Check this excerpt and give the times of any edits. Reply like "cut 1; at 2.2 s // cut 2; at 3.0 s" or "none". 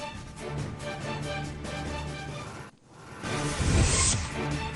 cut 1; at 1.6 s

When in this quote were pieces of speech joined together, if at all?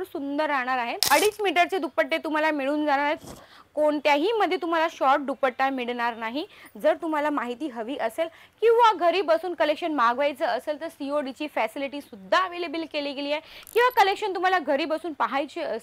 cut 1; at 1.0 s

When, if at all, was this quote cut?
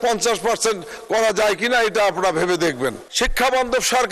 cut 1; at 3.0 s

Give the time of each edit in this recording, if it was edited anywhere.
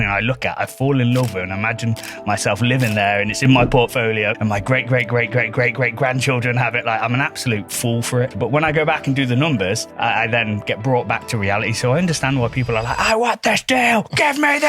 cut 1; at 4.3 s // cut 2; at 8.3 s // cut 3; at 9.9 s

